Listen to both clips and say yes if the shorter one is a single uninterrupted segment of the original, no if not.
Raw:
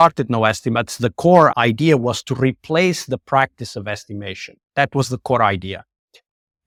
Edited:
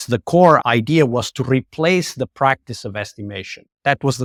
yes